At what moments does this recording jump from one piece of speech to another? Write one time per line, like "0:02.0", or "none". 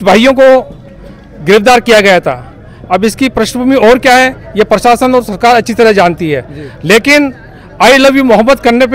none

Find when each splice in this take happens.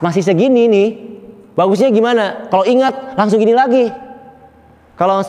none

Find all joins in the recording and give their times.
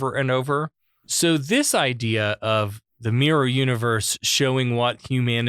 0:01.0

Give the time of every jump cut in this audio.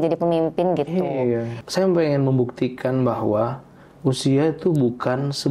0:01.5

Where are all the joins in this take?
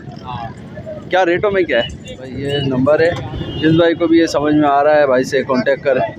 0:02.4

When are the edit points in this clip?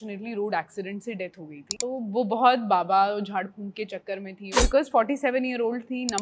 0:01.7
0:04.5

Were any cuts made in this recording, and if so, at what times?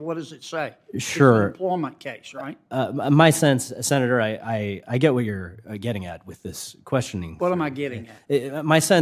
none

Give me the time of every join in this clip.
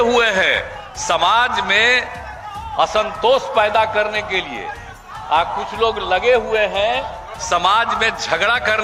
none

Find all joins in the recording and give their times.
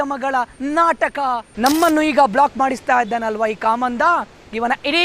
0:01.5

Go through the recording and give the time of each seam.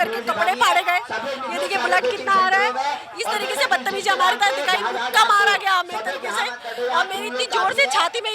none

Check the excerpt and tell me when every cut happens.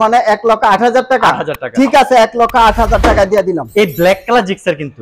none

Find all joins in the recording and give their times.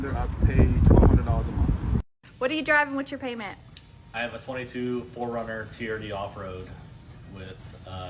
none

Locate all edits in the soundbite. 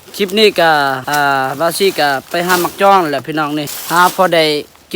0:01.0
0:03.8

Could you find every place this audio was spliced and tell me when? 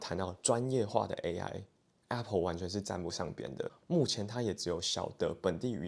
0:03.7

